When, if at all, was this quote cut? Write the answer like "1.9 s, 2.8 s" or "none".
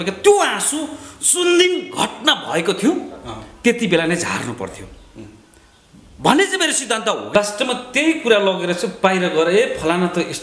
7.2 s